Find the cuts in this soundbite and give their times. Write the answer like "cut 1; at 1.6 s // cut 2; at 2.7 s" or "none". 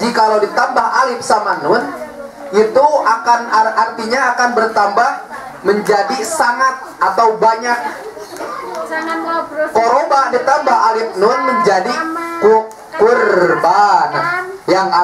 none